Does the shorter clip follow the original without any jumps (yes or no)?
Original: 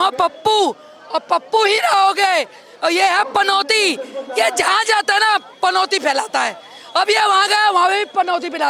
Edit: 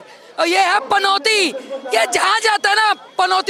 yes